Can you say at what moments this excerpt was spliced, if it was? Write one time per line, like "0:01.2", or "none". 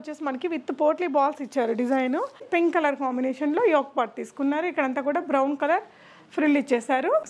0:02.5